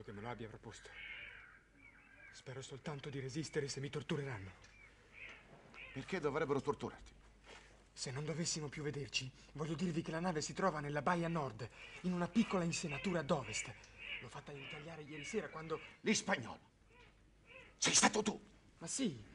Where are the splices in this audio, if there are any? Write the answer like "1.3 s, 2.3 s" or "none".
3.2 s